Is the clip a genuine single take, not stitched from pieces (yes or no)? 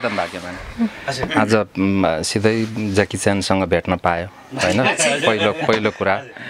yes